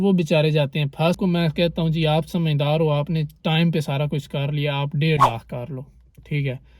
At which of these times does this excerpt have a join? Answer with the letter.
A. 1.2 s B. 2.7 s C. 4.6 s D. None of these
A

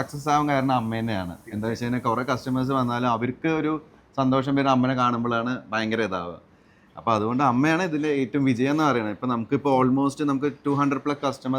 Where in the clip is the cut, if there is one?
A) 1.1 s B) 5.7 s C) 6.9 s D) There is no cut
D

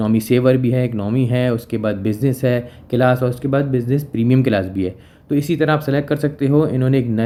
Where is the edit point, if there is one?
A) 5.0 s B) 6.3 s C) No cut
C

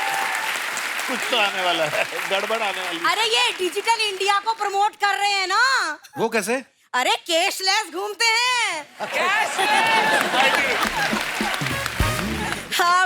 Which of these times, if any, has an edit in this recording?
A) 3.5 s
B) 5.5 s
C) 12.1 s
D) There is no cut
D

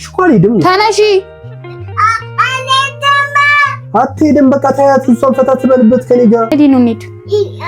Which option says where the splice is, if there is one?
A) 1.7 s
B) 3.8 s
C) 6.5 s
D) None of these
C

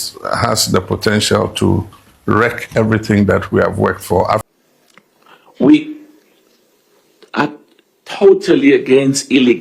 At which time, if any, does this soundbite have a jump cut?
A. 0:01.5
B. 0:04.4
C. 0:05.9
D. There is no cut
B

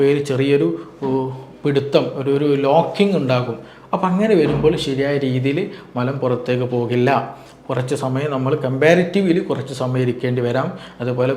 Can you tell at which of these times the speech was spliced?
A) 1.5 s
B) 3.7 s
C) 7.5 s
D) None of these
D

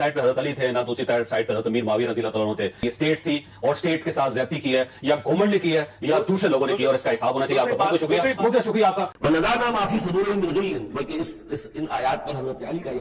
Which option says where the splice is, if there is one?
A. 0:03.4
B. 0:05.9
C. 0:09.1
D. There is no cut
C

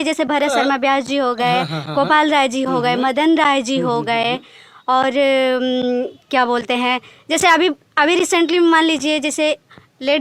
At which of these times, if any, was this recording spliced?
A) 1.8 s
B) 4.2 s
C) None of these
C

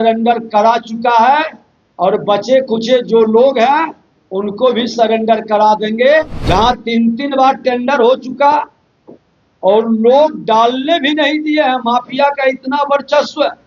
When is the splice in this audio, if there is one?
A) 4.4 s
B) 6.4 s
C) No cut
B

